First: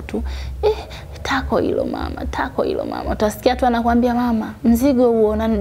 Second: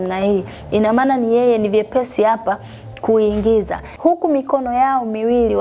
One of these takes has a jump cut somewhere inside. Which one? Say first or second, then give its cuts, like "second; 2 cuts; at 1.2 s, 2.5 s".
second; 1 cut; at 3.8 s